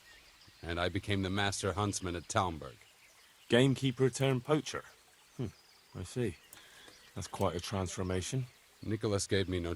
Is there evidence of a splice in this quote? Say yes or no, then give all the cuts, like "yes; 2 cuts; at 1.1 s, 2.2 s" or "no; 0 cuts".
yes; 1 cut; at 8.7 s